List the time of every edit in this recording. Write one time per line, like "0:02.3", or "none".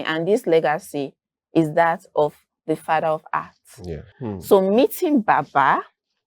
0:04.1